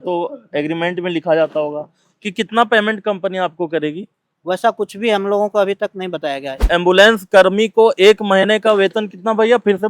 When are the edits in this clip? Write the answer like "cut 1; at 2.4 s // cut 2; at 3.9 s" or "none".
cut 1; at 6.6 s